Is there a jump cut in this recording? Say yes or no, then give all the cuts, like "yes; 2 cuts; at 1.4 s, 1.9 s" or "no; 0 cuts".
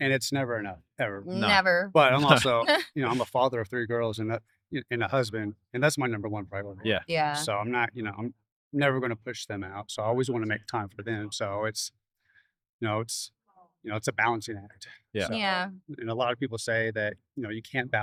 no; 0 cuts